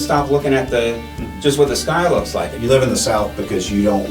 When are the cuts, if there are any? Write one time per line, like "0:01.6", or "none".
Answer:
0:02.5